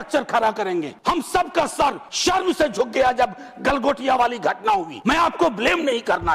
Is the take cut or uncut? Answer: cut